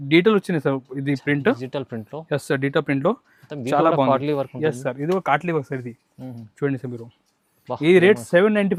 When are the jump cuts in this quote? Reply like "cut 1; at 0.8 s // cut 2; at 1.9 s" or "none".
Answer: none